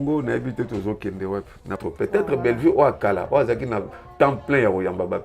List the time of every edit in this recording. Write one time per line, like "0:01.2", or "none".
0:01.8